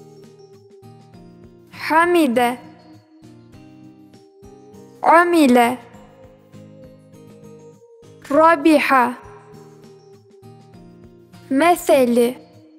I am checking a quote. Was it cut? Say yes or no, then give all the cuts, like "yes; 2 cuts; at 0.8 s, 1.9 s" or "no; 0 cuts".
no; 0 cuts